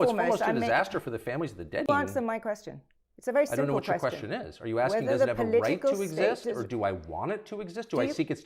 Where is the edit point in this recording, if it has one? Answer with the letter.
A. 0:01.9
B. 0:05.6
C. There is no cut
A